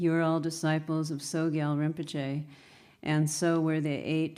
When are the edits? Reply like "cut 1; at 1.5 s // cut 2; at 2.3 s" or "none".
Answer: cut 1; at 1.5 s